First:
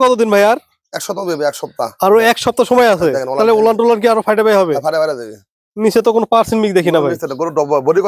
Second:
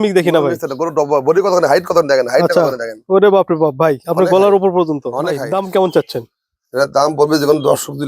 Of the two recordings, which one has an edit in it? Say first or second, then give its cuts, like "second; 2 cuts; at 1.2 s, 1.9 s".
second; 1 cut; at 5.4 s